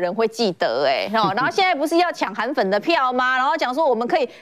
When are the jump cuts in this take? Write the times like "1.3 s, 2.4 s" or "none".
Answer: none